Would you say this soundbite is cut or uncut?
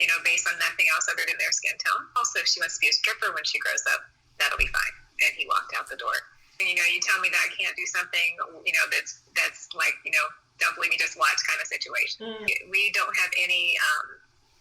cut